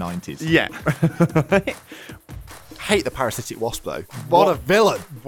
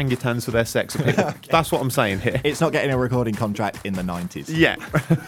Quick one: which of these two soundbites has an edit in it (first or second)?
first